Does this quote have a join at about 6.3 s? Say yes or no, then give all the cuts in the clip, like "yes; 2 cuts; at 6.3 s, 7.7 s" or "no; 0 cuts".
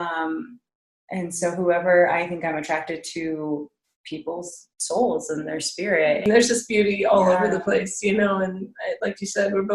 yes; 1 cut; at 6.3 s